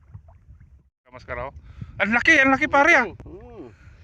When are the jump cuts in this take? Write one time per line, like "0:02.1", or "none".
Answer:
0:01.2

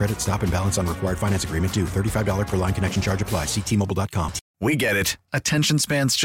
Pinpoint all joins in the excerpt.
0:04.4

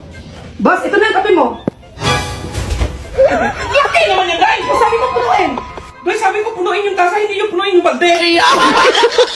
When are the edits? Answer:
0:08.2

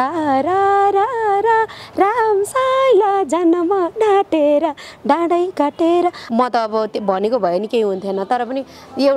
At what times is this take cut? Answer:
0:06.2

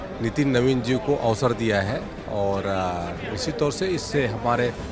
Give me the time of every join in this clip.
none

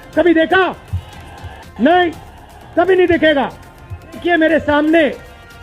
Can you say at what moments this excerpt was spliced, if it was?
0:04.2

